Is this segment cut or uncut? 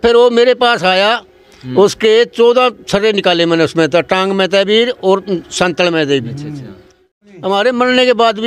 cut